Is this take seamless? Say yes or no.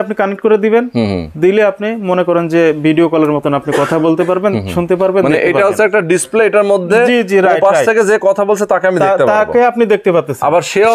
yes